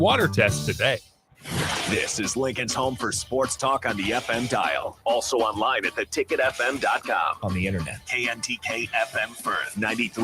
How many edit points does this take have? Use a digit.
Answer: 1